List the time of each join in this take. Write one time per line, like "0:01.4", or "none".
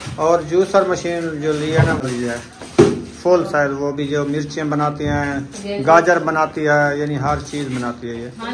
0:02.0